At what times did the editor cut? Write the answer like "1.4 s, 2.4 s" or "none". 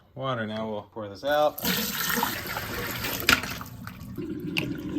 2.4 s